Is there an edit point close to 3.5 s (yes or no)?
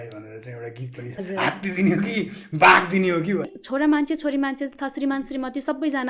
yes